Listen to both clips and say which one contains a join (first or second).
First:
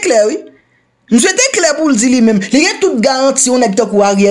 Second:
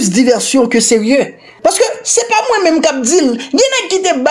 second